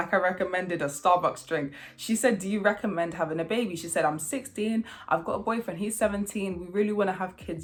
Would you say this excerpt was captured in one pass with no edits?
yes; 0 cuts

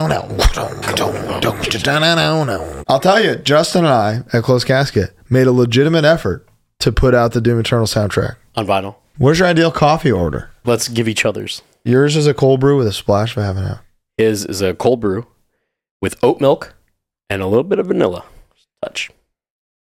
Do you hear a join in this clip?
yes; 4 cuts; at 2.7 s, 9.0 s, 10.6 s, 11.8 s

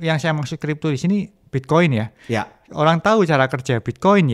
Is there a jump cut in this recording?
no; 0 cuts

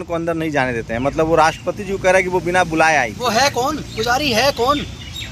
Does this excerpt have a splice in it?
no; 0 cuts

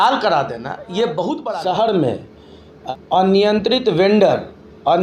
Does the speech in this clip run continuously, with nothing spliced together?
no; 2 cuts; at 1.5 s, 2.8 s

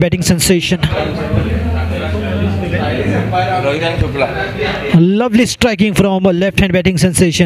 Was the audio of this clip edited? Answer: no; 0 cuts

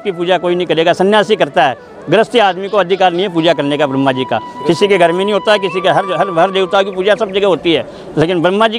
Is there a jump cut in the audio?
no; 0 cuts

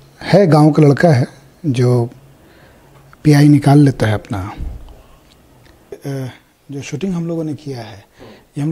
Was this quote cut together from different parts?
yes; 1 cut; at 6.0 s

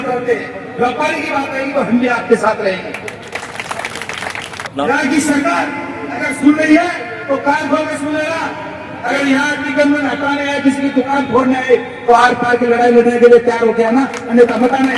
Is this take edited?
yes; 1 cut; at 4.7 s

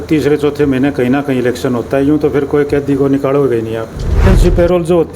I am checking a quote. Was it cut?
yes; 1 cut; at 4.2 s

